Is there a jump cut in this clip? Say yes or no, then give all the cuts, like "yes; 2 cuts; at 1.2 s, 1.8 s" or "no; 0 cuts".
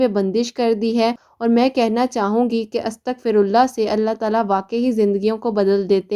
yes; 1 cut; at 1.3 s